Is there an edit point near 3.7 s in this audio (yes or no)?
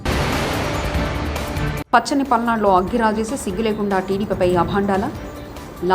no